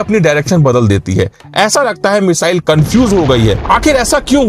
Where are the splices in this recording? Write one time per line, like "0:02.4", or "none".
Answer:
0:03.6